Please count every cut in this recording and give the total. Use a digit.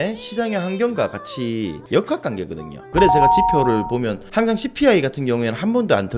2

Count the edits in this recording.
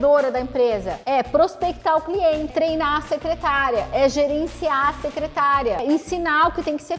3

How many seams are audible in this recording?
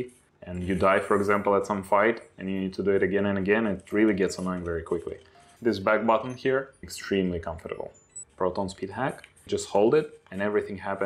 3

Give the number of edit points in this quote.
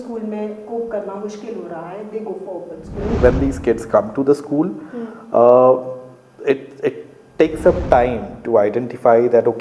1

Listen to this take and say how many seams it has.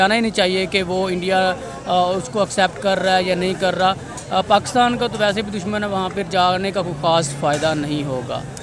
0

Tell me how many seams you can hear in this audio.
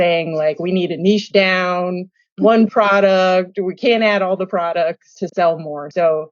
1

